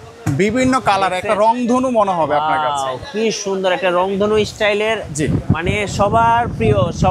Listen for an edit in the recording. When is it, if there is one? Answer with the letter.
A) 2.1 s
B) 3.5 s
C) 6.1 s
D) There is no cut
D